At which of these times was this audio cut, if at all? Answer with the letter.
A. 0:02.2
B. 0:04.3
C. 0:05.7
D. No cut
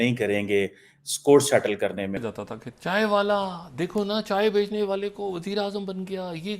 A